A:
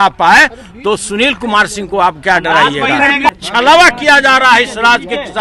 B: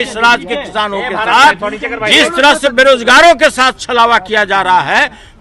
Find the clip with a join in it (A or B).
A